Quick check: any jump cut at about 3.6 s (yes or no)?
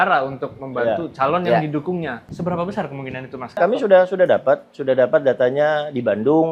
yes